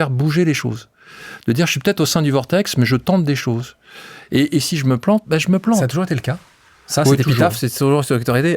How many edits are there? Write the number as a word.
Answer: zero